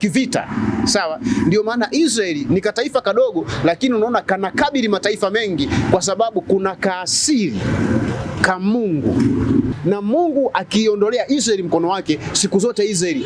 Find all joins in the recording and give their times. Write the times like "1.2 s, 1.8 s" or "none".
9.7 s